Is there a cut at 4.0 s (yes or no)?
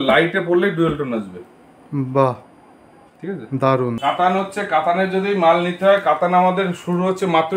yes